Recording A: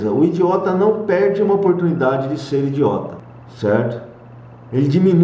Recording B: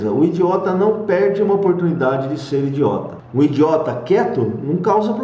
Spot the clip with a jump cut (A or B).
B